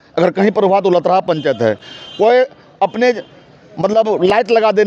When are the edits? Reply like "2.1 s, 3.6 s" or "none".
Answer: none